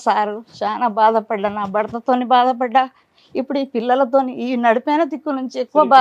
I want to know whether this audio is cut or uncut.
uncut